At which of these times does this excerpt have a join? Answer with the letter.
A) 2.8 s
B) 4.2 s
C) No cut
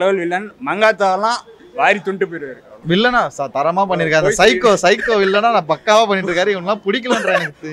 A